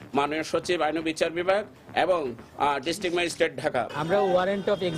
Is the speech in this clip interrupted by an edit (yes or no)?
yes